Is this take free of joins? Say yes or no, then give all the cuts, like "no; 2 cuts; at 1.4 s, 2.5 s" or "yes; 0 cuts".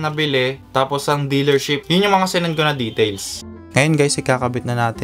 no; 1 cut; at 3.4 s